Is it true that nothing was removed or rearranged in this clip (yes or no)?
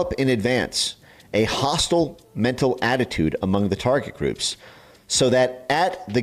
yes